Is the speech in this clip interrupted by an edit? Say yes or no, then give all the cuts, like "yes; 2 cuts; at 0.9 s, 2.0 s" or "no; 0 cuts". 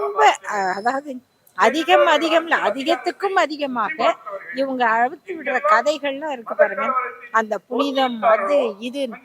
no; 0 cuts